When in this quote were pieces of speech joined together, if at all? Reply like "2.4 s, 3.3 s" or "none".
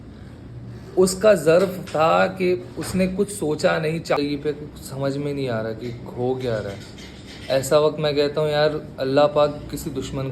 4.2 s